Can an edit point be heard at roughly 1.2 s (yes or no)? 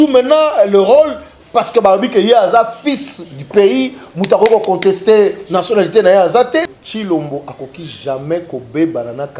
no